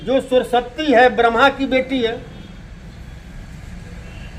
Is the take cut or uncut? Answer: uncut